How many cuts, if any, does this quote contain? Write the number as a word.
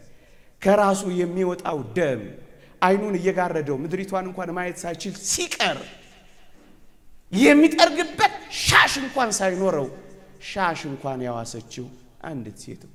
zero